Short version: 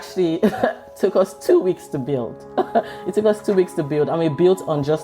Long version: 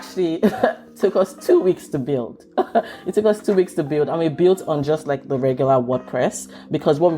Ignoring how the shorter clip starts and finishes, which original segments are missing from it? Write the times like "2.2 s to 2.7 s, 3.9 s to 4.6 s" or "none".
none